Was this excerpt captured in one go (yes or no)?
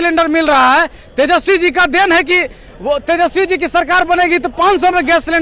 yes